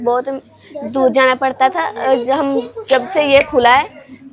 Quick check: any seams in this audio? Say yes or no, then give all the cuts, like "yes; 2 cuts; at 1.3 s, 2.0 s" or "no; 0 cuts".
no; 0 cuts